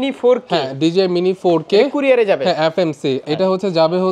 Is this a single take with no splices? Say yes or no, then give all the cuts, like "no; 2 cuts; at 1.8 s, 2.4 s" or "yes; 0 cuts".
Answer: no; 1 cut; at 3.2 s